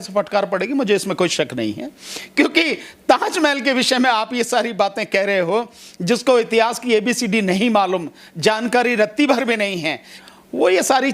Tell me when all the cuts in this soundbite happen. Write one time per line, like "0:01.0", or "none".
0:10.2

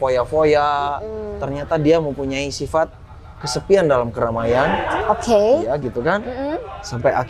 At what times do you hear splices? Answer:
none

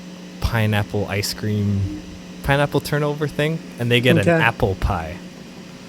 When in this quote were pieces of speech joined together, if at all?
none

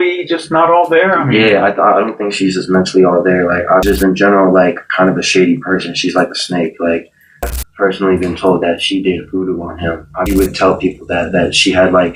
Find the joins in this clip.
0:03.8
0:07.5
0:10.3

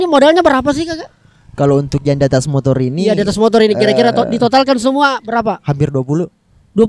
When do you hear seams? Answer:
none

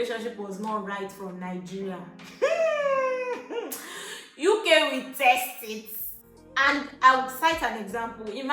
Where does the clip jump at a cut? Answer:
none

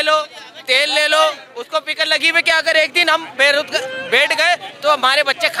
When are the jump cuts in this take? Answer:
none

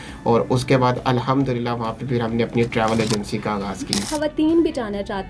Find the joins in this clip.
0:04.0

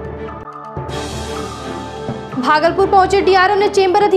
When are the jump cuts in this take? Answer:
0:02.2

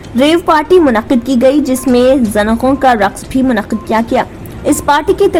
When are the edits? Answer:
none

